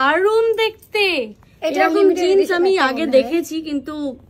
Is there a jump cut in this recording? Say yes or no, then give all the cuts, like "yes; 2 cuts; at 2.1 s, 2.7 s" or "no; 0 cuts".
no; 0 cuts